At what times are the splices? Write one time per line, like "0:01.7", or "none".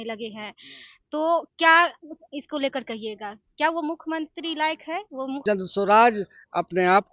0:05.4